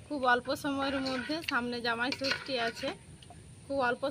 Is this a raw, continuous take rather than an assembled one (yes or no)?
yes